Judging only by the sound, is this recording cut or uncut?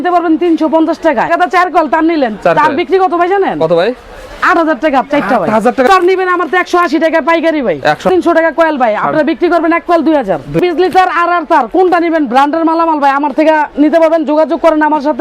cut